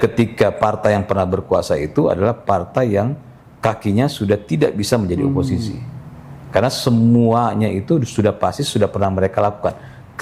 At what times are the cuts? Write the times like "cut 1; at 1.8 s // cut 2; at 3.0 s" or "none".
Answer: none